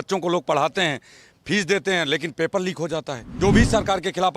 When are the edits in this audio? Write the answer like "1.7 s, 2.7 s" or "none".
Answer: 3.2 s